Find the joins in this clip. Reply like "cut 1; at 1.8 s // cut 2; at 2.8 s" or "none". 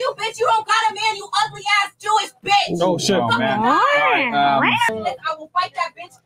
cut 1; at 4.9 s